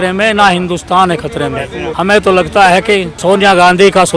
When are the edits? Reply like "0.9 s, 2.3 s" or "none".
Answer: 1.9 s, 3.1 s